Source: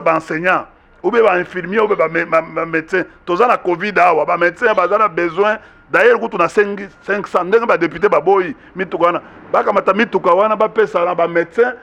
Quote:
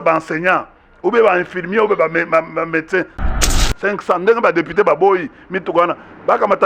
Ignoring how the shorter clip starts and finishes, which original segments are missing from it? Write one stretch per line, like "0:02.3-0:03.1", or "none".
0:03.4-0:06.6